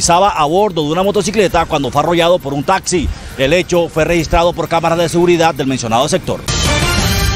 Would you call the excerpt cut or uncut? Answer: cut